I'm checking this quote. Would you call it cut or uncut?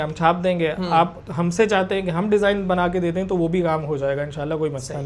uncut